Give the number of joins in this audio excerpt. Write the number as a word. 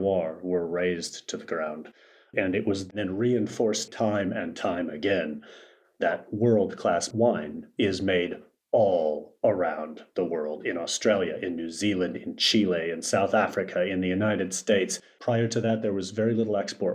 three